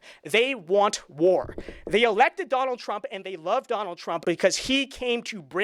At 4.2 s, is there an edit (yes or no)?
yes